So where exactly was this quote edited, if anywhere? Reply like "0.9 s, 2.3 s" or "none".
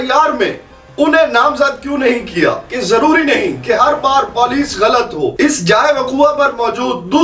2.7 s, 5.3 s